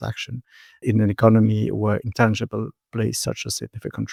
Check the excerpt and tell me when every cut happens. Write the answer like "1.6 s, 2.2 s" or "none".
none